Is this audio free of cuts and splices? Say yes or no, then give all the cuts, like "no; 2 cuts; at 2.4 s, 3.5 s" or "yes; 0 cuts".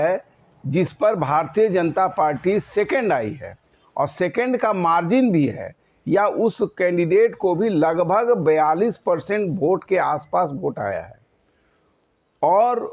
yes; 0 cuts